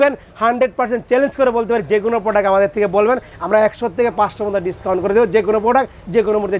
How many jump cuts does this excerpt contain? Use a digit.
0